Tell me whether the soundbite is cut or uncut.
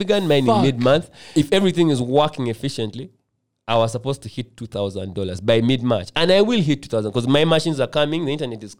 cut